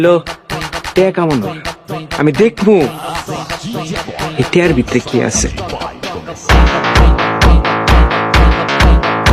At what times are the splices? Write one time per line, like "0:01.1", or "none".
none